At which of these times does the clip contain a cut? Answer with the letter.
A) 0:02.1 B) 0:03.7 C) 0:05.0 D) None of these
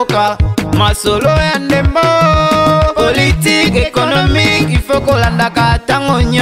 D